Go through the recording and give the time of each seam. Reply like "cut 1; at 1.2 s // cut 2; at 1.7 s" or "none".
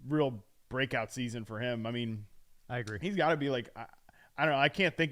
none

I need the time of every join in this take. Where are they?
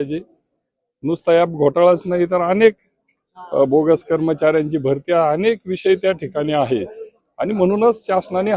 none

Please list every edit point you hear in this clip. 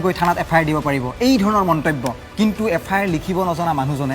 cut 1; at 2.2 s

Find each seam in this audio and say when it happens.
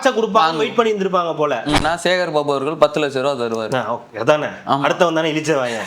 cut 1; at 1.8 s

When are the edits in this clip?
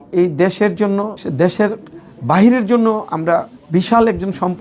cut 1; at 1.2 s // cut 2; at 3.6 s

